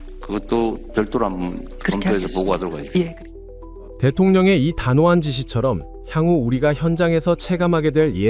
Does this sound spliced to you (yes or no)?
no